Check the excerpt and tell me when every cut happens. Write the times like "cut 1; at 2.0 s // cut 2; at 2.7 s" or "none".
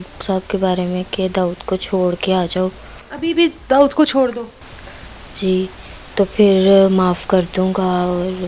none